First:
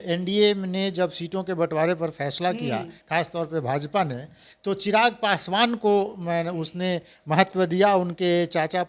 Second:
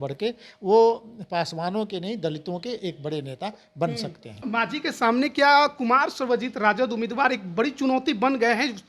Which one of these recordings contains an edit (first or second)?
second